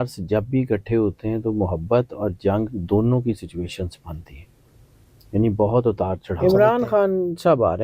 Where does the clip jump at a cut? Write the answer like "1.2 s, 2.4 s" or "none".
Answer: 6.4 s